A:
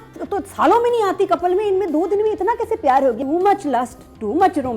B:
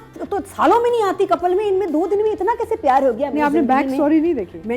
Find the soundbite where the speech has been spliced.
A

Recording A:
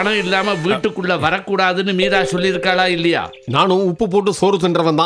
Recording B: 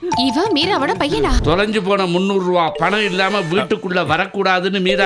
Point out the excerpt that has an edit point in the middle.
B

